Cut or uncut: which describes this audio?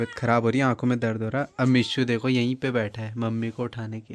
uncut